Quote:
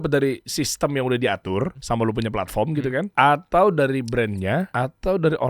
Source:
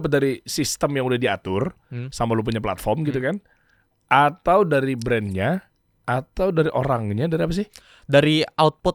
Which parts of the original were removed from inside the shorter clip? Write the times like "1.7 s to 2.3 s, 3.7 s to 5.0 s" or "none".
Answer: 1.8 s to 2.1 s, 3.4 s to 4.0 s, 5.6 s to 6.0 s